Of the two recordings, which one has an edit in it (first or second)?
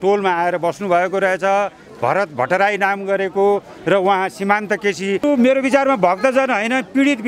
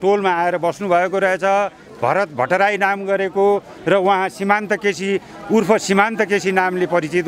first